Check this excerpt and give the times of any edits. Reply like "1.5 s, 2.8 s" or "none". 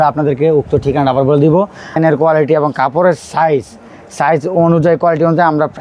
2.0 s